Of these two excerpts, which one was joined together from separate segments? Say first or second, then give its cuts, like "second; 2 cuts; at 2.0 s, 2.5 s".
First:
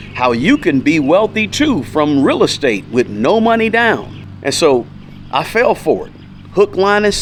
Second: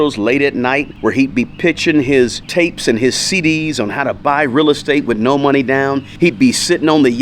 second; 3 cuts; at 0.9 s, 2.4 s, 6.1 s